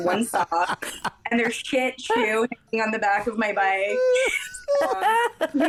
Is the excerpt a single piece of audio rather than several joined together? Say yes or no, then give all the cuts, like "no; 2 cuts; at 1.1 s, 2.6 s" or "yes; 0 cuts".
yes; 0 cuts